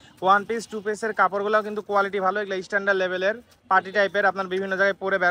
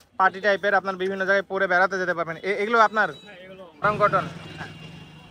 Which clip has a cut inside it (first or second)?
second